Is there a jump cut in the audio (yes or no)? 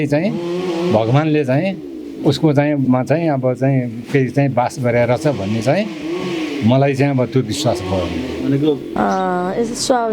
yes